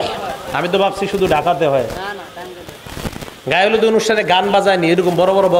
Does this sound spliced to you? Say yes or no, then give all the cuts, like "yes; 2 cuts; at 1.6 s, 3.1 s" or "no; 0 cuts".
no; 0 cuts